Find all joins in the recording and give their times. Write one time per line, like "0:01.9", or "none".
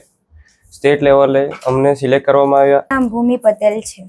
0:02.9